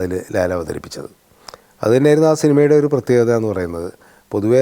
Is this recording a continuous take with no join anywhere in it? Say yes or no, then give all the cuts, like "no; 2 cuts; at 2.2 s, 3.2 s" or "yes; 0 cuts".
yes; 0 cuts